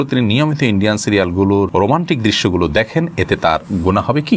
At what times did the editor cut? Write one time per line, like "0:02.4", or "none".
0:01.7